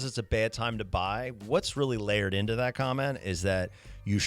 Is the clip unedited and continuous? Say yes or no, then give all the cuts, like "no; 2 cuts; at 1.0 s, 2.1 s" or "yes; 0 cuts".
yes; 0 cuts